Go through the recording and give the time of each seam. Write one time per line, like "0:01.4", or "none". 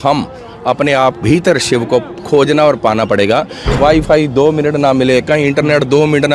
0:03.8